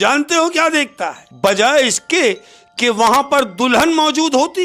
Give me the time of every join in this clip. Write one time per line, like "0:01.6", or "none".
0:01.2